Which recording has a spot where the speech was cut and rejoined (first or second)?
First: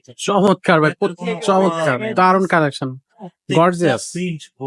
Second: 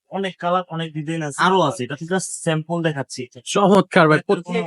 second